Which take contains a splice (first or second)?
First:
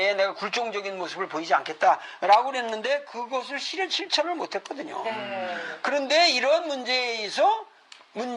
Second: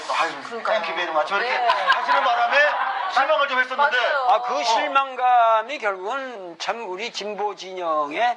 first